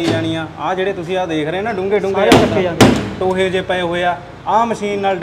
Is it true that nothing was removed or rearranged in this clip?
yes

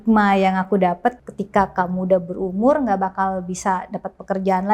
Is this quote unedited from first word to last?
no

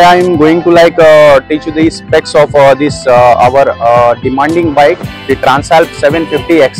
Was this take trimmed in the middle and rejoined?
no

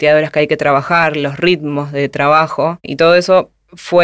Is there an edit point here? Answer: yes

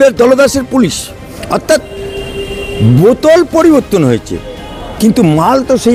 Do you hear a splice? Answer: no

